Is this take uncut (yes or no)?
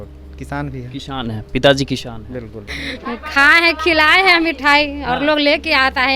no